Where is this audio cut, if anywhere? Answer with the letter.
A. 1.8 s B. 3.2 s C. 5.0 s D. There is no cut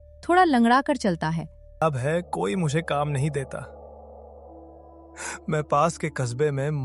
A